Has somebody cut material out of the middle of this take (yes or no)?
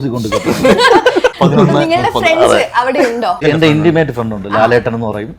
yes